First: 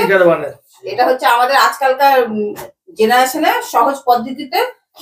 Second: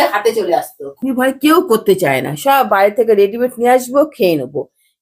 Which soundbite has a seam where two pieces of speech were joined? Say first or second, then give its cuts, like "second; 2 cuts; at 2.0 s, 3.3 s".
second; 1 cut; at 1.0 s